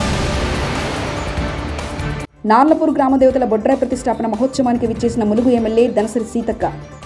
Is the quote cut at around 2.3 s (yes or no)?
yes